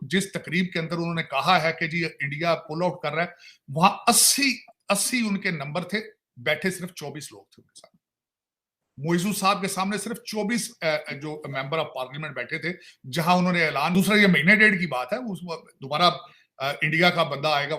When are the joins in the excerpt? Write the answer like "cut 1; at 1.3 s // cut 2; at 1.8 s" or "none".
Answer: cut 1; at 13.9 s